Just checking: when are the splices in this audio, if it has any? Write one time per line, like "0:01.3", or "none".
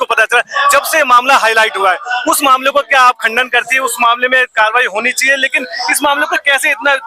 none